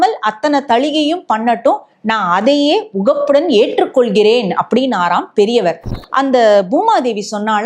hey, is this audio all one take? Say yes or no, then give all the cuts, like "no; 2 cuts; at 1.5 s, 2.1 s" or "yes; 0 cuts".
no; 1 cut; at 6.0 s